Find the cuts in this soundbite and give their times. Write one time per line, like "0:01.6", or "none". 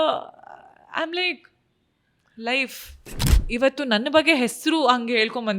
0:03.3